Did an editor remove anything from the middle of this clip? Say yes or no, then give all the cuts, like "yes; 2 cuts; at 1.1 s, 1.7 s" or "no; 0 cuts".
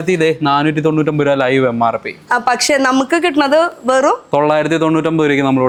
no; 0 cuts